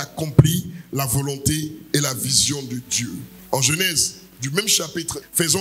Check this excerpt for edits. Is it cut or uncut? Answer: uncut